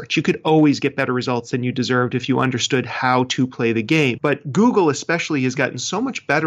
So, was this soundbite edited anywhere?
yes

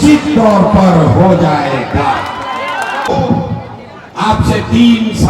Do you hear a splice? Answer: yes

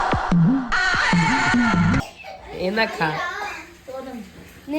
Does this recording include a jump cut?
yes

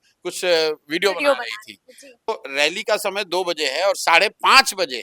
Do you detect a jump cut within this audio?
yes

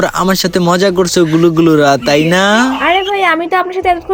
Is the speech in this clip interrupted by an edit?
no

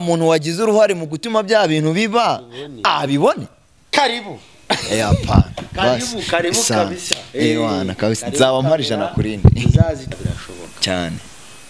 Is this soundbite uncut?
no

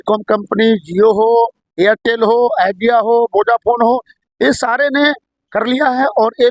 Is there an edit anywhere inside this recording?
no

